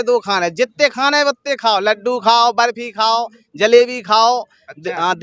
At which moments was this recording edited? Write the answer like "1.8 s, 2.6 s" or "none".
none